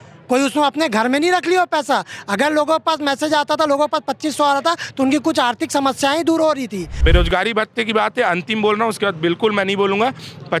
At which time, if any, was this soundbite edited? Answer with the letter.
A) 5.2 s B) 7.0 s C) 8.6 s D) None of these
B